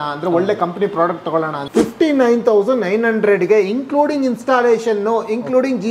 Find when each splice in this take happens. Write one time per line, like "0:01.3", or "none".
0:01.6